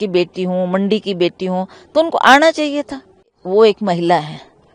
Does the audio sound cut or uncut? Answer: cut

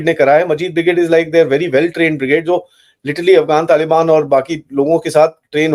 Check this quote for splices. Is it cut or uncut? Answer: uncut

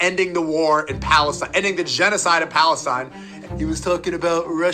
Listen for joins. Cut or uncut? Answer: cut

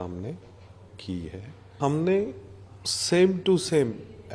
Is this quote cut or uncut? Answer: cut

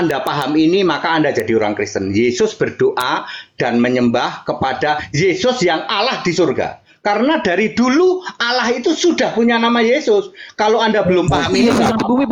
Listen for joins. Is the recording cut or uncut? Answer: uncut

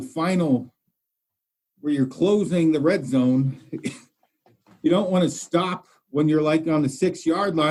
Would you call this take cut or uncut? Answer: uncut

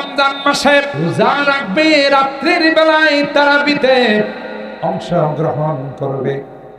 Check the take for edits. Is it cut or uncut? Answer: cut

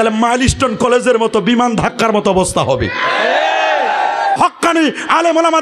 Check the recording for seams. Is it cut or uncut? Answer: cut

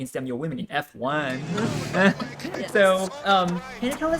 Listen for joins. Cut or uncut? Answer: uncut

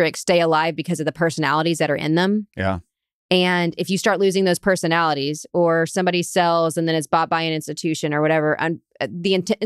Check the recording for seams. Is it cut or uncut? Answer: uncut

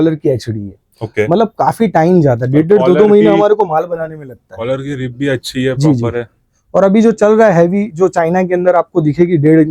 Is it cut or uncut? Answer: uncut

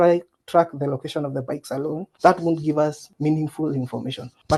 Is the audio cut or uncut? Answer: uncut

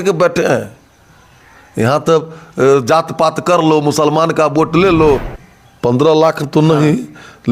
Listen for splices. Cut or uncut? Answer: cut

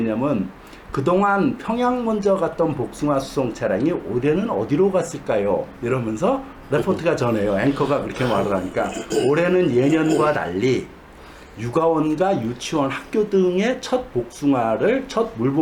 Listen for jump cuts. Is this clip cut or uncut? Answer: uncut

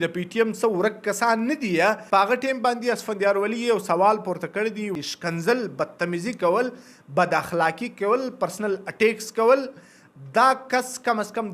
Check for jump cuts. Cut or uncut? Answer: cut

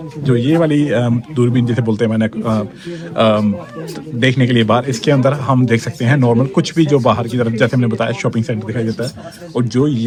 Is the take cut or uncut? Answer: uncut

